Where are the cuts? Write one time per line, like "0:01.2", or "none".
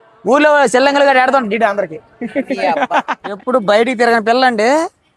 0:03.3